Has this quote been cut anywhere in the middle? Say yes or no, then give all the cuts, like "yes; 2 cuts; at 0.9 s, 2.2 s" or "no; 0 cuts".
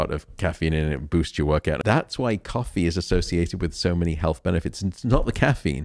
yes; 1 cut; at 1.8 s